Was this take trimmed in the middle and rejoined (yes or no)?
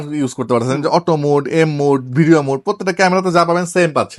no